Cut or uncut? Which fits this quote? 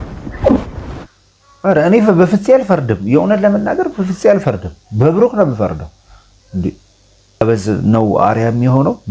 cut